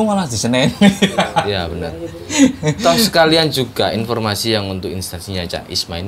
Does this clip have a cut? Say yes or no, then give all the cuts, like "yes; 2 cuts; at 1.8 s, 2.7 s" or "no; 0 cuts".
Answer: no; 0 cuts